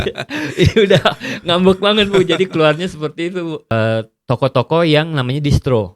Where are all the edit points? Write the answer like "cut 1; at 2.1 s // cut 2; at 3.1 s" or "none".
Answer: cut 1; at 3.7 s